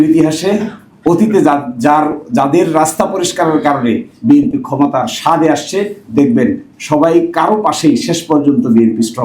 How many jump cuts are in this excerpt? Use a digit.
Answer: 0